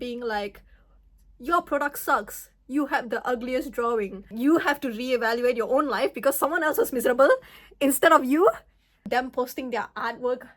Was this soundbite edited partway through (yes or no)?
yes